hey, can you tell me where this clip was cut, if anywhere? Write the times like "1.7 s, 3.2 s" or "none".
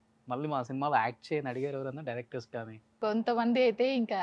2.9 s